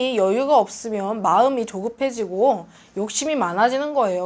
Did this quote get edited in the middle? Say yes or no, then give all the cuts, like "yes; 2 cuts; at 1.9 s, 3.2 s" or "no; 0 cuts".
no; 0 cuts